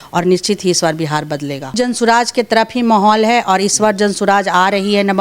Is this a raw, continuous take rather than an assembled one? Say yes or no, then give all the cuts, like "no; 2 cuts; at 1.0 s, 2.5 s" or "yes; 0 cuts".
no; 1 cut; at 1.8 s